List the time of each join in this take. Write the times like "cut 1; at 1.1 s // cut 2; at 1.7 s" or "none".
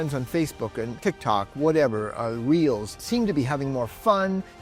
cut 1; at 1.0 s // cut 2; at 3.0 s